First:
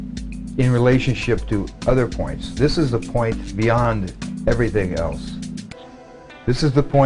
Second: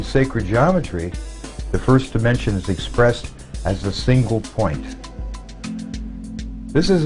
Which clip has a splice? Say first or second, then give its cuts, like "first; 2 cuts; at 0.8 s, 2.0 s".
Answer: first; 1 cut; at 6.0 s